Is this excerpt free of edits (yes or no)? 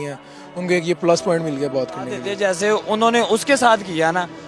no